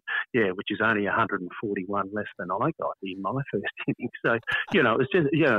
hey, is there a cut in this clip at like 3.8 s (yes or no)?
no